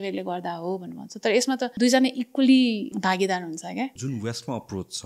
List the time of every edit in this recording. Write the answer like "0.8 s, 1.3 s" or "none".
1.7 s, 2.9 s, 4.0 s

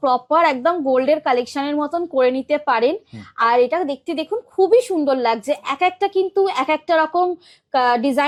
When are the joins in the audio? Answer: none

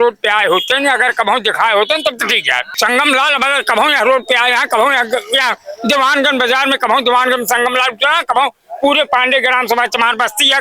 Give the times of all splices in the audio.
2.7 s

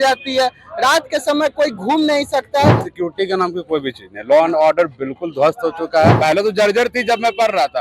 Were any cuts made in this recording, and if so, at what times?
2.9 s, 6.2 s

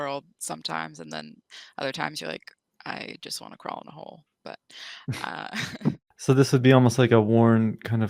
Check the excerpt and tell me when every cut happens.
5.8 s

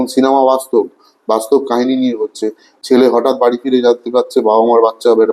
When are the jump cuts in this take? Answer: none

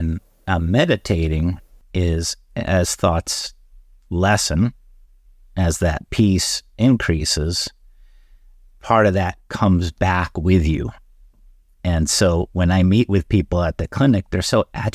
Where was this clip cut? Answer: 1.7 s

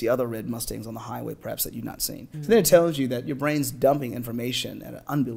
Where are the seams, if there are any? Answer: 2.3 s

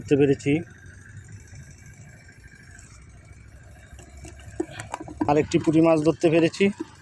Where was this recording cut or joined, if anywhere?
5.3 s

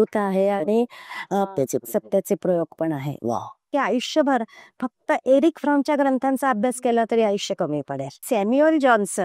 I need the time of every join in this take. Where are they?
3.7 s, 8.2 s

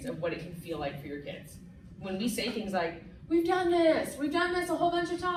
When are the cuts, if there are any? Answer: none

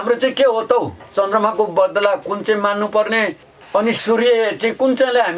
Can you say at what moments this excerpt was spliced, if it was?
3.5 s

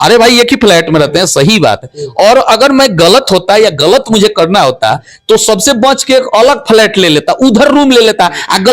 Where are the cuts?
none

